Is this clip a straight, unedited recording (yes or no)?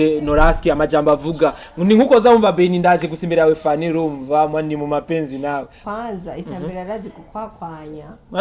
no